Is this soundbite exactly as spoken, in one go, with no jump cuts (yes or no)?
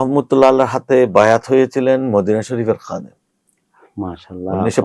yes